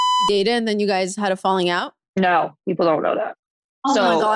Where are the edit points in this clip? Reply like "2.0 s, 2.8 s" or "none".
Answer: 2.0 s